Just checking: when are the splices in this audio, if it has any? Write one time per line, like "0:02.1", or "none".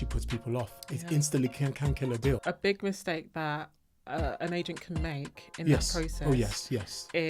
0:02.4